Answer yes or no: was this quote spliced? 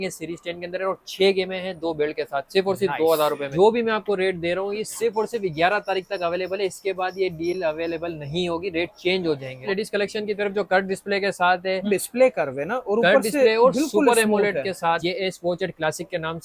yes